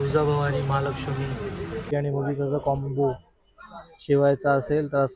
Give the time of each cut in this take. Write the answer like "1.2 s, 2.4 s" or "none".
1.9 s